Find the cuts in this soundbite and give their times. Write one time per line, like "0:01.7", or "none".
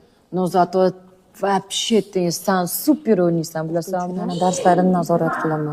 0:04.2